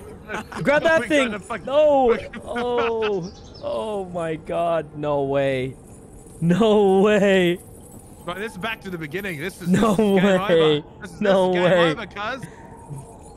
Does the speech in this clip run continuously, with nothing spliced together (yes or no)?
yes